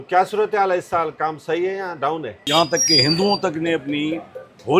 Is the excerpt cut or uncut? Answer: cut